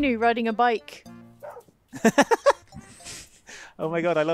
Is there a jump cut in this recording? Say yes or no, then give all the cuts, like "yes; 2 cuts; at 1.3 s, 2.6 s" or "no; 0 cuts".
yes; 1 cut; at 0.9 s